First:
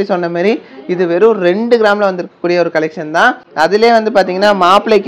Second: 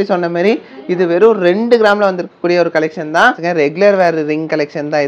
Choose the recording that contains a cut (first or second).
second